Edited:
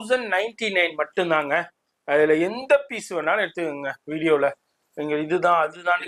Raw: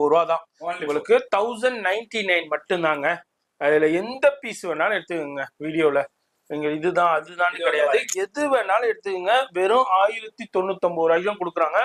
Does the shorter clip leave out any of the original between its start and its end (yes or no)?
no